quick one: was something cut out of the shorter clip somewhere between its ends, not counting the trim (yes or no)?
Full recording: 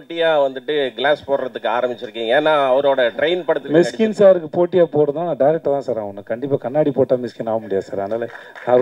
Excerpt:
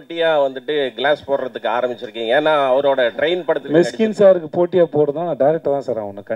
no